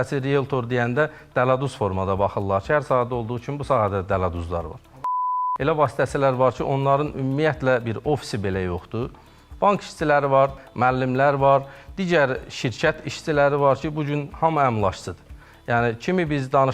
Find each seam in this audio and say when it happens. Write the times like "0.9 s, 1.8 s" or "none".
5.4 s, 10.5 s